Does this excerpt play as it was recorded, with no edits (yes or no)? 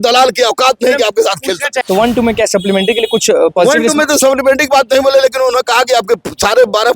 no